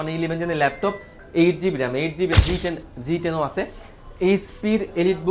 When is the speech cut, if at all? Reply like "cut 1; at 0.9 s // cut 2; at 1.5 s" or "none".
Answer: cut 1; at 2.3 s